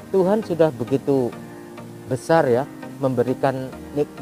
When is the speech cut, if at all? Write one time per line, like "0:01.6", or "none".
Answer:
none